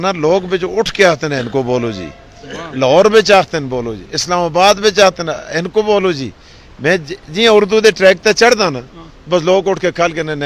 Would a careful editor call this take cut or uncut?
uncut